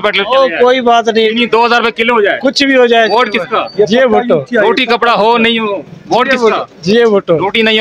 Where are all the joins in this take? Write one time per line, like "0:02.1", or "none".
none

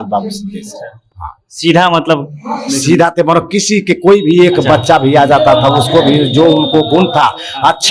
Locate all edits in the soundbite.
none

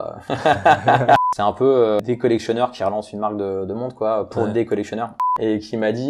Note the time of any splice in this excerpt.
0:01.2
0:02.0
0:05.3

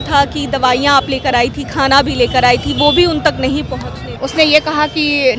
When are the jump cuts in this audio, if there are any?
0:04.0

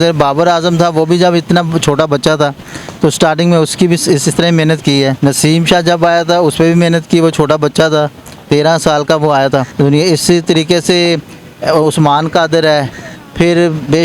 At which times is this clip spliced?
0:05.2
0:09.7

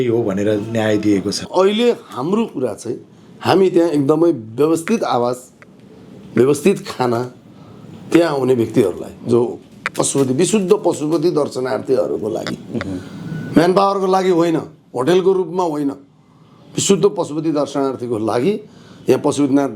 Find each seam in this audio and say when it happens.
0:01.4

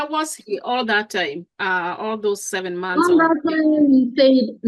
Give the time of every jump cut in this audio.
none

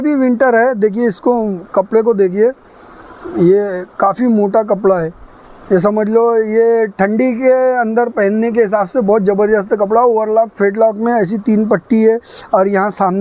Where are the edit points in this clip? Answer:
none

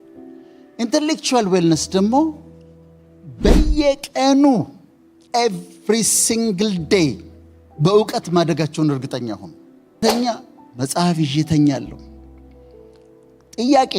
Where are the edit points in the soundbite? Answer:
0:10.0

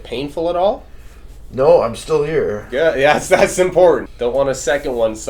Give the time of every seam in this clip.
0:04.1

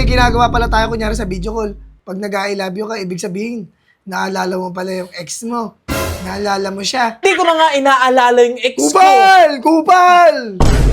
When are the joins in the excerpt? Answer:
0:07.2

